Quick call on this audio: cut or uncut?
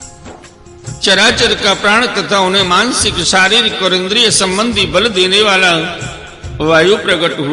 cut